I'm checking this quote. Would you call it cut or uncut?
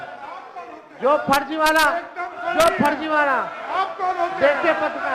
uncut